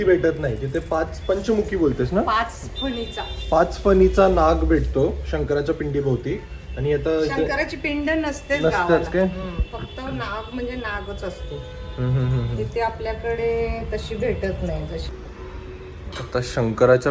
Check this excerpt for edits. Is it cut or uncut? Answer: uncut